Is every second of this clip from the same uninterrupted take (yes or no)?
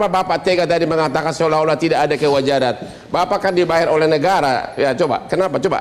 yes